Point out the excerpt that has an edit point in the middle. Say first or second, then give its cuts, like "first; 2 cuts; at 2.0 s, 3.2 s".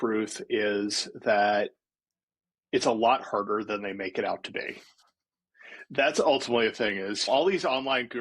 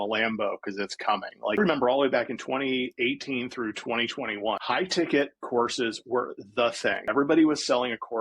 second; 3 cuts; at 1.6 s, 4.6 s, 7.0 s